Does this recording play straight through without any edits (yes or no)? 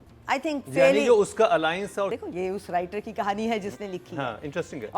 no